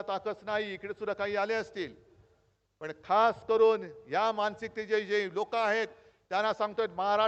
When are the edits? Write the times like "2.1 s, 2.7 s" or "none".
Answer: none